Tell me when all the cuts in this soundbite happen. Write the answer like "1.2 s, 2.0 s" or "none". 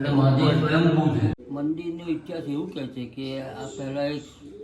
1.4 s